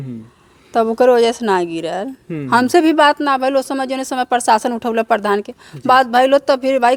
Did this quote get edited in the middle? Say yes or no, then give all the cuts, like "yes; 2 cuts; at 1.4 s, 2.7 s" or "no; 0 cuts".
no; 0 cuts